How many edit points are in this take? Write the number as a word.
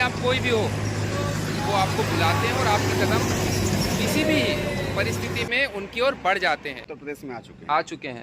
one